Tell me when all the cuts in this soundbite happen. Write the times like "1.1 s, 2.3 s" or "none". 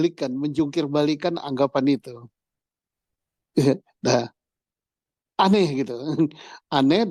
none